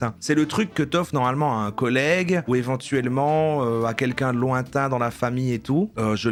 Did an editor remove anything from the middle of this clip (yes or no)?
no